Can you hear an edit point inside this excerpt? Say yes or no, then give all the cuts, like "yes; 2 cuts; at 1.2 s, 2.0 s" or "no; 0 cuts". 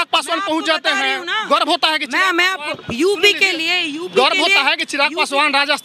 no; 0 cuts